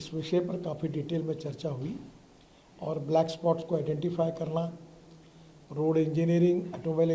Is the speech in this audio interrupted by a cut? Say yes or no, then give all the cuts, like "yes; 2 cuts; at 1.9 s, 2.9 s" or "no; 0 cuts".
no; 0 cuts